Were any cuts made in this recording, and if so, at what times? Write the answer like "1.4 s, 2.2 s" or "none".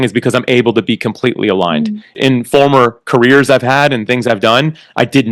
2.2 s

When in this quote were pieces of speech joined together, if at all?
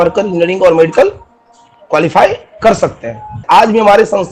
3.4 s

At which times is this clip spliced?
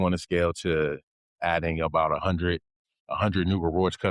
none

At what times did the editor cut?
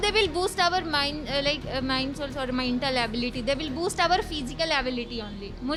none

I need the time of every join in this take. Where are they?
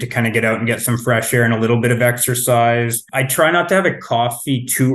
3.2 s

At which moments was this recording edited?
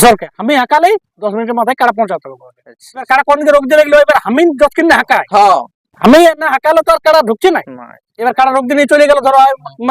3.1 s

